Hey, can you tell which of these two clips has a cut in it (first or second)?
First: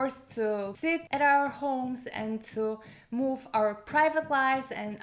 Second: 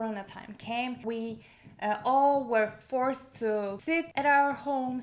second